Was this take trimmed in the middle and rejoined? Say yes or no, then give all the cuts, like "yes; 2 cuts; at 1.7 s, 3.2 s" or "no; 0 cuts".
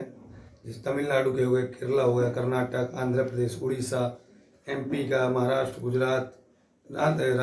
no; 0 cuts